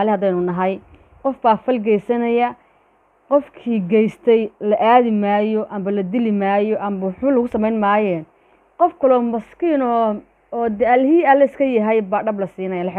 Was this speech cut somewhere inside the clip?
no; 0 cuts

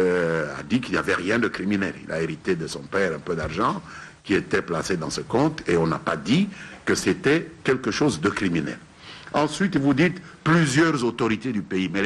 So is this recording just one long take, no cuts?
yes; 0 cuts

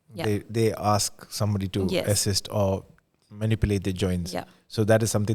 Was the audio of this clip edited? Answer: no; 0 cuts

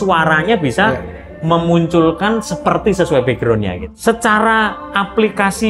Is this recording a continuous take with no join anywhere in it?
yes; 0 cuts

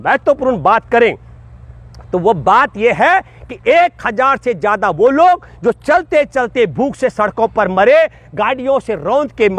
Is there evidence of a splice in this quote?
no; 0 cuts

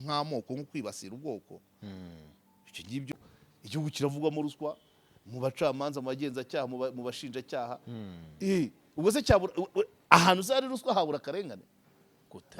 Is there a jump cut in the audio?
yes; 1 cut; at 3.1 s

